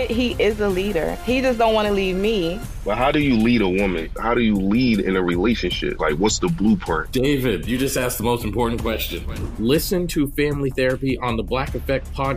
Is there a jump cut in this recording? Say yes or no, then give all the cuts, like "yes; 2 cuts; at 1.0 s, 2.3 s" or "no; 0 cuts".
no; 0 cuts